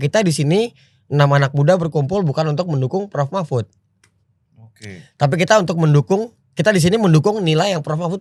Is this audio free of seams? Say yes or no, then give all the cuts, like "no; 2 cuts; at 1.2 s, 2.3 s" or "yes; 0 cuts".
yes; 0 cuts